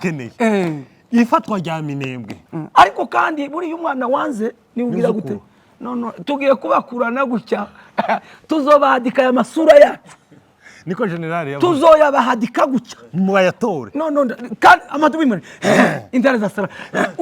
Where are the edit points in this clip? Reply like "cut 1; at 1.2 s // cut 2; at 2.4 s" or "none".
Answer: cut 1; at 2.3 s